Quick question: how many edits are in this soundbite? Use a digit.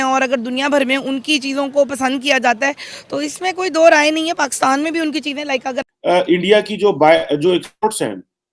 1